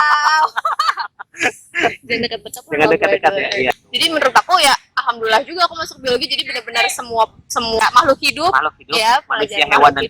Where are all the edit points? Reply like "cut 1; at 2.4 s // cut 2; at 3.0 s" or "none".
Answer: cut 1; at 3.7 s // cut 2; at 7.8 s